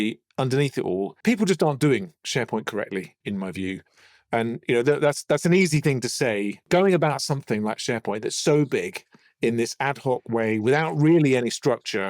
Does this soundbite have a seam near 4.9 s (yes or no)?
no